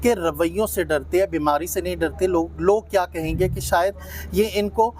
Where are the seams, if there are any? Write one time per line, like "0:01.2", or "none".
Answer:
none